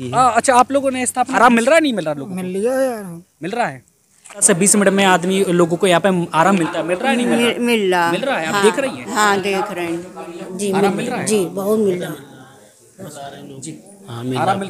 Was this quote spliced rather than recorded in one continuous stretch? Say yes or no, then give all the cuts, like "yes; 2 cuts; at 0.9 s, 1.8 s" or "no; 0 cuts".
yes; 3 cuts; at 1.3 s, 4.5 s, 10.5 s